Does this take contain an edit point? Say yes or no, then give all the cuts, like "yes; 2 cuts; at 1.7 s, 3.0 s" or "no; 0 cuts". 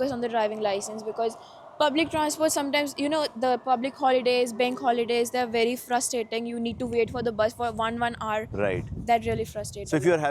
no; 0 cuts